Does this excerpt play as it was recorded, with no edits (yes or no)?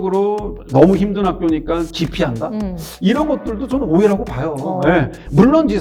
yes